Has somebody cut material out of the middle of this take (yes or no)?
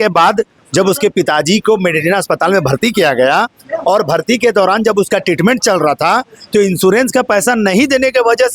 no